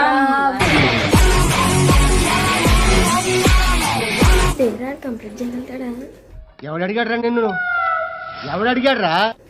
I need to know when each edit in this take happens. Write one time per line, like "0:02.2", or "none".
0:04.5